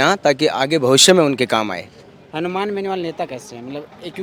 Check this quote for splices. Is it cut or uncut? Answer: uncut